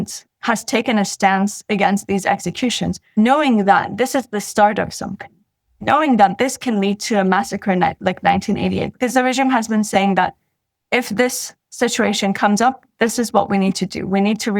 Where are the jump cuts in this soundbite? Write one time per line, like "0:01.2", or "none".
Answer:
0:03.0